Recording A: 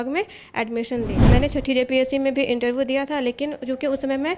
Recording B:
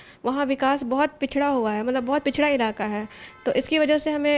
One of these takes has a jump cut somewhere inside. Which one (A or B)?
A